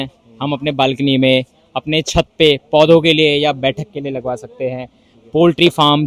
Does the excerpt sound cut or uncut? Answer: uncut